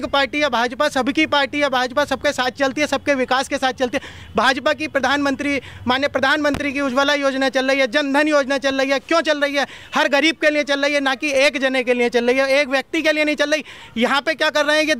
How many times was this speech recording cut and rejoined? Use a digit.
0